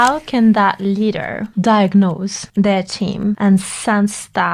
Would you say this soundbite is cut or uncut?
cut